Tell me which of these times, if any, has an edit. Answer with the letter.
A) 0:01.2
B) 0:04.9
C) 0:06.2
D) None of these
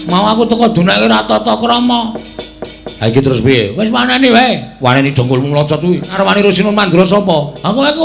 C